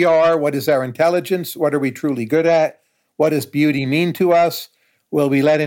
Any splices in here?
no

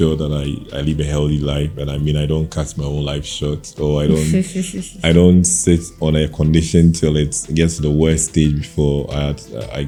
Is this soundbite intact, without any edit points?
yes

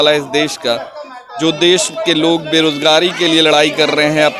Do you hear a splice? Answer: no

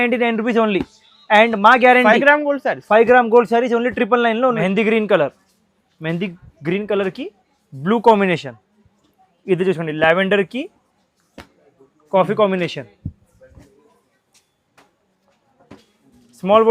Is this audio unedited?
no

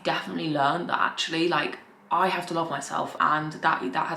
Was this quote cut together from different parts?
no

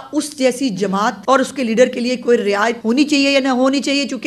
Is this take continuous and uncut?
no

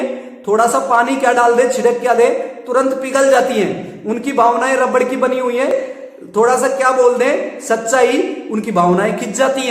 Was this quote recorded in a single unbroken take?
no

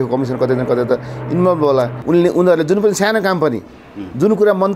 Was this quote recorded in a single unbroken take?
no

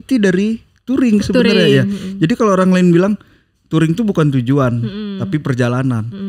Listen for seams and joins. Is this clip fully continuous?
yes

